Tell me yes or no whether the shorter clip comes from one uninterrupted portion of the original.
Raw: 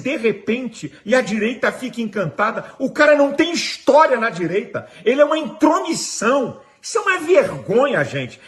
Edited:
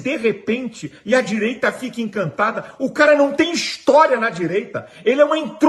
yes